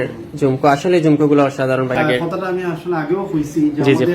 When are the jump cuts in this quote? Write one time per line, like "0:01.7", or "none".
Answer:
0:02.0